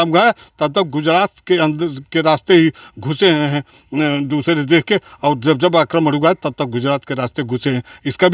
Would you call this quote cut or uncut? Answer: uncut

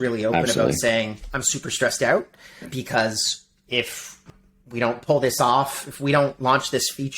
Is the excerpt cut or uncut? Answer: cut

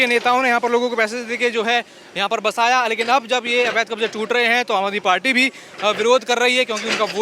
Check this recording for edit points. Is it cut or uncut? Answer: uncut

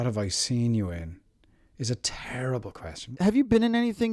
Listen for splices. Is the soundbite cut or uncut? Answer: cut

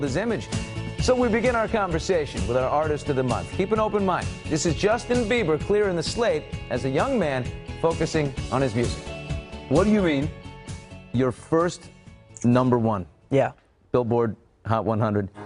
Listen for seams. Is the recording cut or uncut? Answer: cut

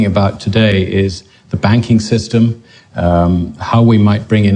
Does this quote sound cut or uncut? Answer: cut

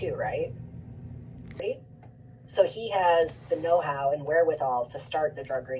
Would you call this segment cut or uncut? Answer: cut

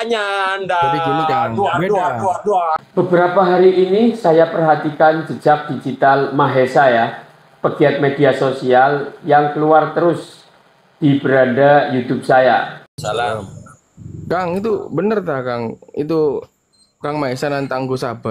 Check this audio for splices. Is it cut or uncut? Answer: cut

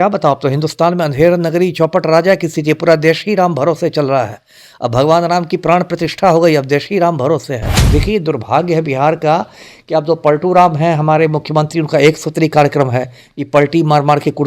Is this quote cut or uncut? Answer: cut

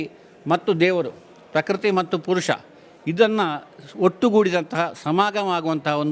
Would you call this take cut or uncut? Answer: uncut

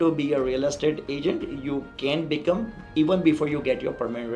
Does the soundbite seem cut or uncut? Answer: uncut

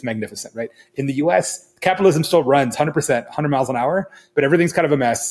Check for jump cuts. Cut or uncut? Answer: uncut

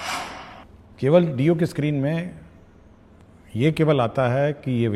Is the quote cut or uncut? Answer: uncut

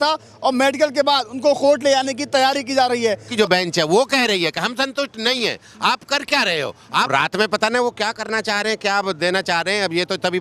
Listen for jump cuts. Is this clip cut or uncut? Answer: cut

